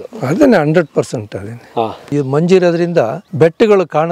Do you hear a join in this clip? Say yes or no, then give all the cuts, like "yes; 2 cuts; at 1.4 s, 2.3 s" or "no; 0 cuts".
yes; 2 cuts; at 2.1 s, 3.2 s